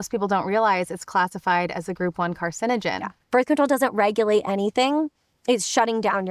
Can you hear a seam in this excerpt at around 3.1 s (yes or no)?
yes